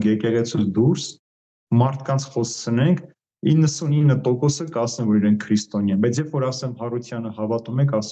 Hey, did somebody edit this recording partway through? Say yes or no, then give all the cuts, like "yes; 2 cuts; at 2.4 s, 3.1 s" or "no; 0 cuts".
no; 0 cuts